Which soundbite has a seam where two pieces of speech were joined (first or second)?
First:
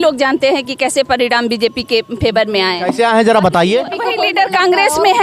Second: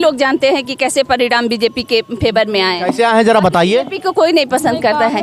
first